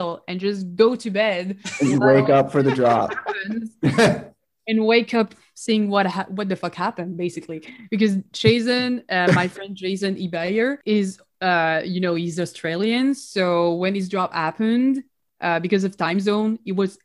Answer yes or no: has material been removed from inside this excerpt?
yes